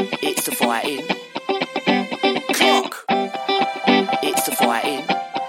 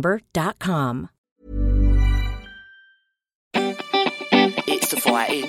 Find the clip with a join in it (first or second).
second